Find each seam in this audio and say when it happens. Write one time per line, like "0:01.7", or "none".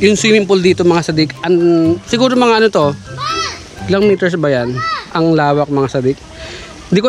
none